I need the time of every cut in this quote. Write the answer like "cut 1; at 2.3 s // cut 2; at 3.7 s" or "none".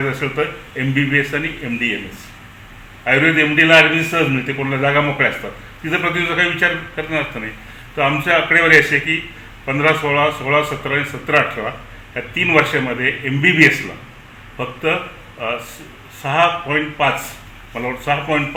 none